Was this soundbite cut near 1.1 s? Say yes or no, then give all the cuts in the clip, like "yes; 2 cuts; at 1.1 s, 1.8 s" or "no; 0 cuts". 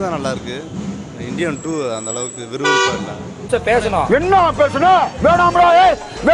no; 1 cut; at 3.3 s